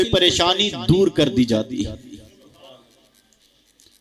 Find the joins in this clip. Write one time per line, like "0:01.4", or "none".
none